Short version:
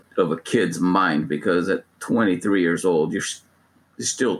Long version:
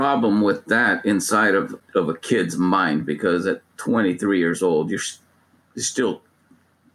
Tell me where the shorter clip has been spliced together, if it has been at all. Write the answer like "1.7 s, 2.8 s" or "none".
none